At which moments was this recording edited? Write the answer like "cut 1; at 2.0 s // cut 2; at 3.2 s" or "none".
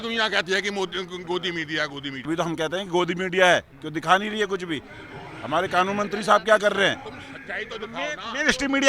cut 1; at 2.2 s